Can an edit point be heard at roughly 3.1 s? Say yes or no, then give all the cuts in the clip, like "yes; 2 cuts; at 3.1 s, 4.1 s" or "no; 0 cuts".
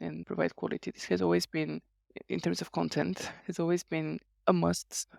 no; 0 cuts